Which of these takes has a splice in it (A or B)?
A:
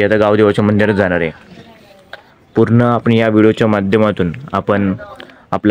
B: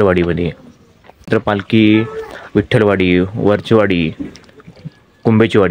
B